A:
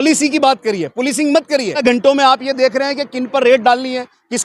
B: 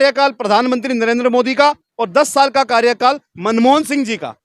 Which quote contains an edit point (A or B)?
A